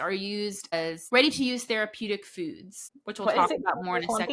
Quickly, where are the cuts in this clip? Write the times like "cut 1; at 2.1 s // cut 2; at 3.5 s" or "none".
cut 1; at 1.0 s